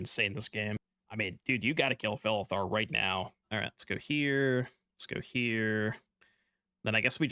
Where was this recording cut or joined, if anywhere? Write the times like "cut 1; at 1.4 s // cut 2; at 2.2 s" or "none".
cut 1; at 1.0 s // cut 2; at 3.5 s